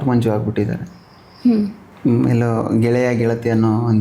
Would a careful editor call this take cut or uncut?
cut